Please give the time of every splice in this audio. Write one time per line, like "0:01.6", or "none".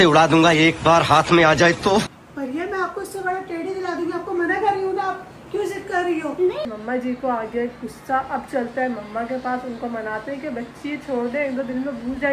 0:02.1
0:06.7